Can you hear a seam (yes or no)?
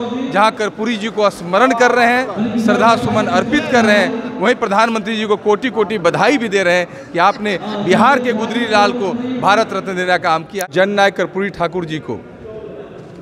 yes